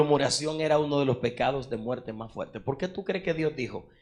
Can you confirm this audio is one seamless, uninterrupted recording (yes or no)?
yes